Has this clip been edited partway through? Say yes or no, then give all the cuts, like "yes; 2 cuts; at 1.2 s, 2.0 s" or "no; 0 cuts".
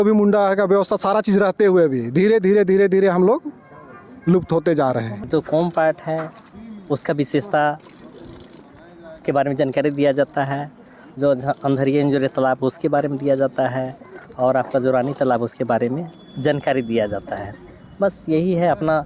yes; 1 cut; at 5.3 s